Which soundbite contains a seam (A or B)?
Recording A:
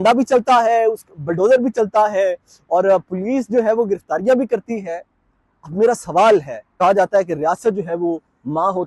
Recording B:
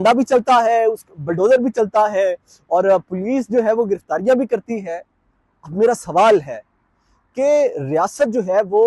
A